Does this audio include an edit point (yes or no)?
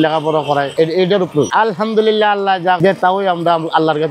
no